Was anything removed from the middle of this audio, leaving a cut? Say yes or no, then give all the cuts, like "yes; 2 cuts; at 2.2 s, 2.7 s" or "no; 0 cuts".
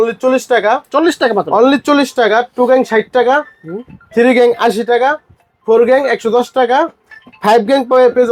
no; 0 cuts